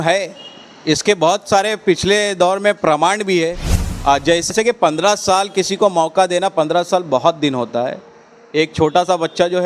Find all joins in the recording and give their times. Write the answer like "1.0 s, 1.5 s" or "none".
4.5 s